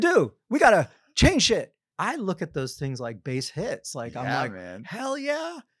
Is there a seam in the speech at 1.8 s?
yes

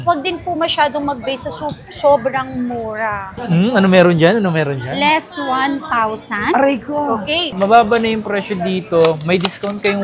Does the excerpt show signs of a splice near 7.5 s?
yes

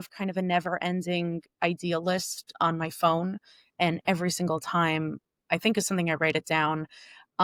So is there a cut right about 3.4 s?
no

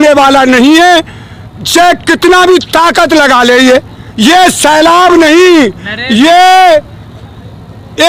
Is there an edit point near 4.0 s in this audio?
no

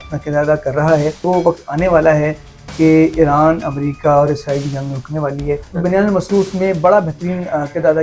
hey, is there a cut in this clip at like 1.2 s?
yes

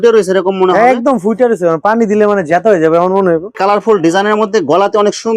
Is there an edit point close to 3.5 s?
yes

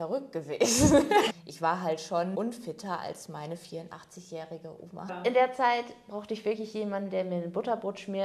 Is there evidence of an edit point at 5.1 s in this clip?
yes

